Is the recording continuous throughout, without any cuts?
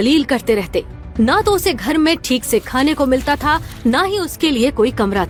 yes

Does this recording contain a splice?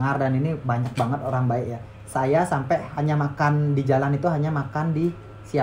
no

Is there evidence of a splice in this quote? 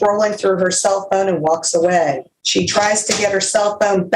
yes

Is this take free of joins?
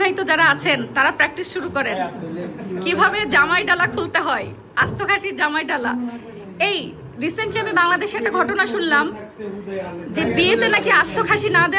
yes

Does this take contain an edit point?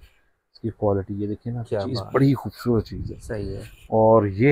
no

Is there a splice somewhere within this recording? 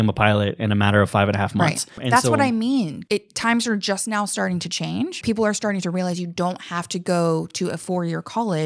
yes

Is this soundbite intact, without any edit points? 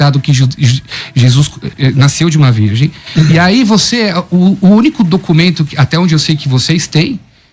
no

